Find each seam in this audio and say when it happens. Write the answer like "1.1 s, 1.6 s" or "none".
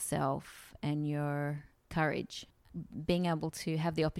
1.7 s, 2.7 s